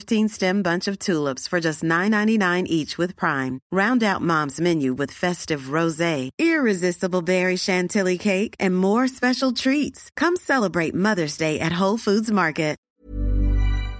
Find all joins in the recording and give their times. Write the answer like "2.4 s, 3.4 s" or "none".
12.8 s